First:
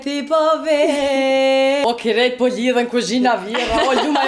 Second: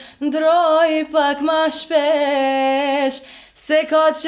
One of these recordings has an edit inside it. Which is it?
first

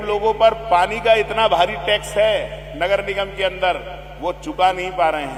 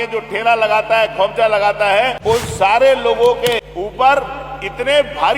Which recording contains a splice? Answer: second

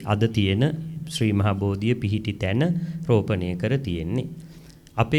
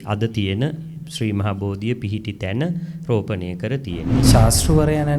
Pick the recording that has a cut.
second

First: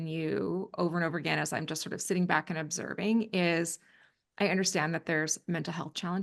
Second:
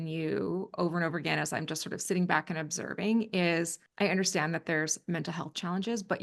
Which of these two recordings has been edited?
second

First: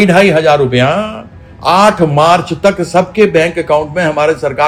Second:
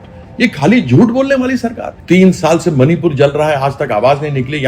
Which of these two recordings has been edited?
second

